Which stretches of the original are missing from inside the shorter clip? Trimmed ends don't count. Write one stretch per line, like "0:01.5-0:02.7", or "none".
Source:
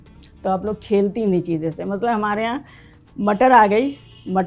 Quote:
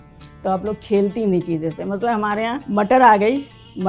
0:02.6-0:03.1